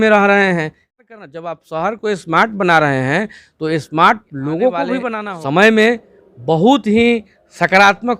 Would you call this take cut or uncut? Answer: cut